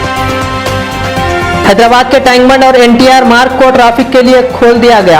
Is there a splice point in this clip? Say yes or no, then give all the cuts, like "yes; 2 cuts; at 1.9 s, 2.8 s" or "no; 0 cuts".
yes; 1 cut; at 1.6 s